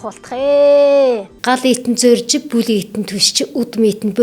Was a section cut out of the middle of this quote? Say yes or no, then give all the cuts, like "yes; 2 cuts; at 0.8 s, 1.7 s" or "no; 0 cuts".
yes; 1 cut; at 1.3 s